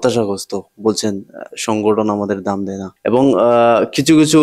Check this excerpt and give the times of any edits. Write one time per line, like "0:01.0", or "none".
0:02.8